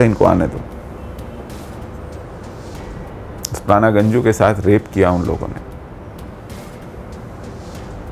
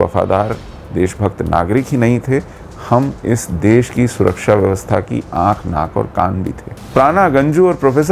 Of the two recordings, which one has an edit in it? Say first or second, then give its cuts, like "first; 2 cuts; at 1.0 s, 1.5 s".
second; 1 cut; at 6.7 s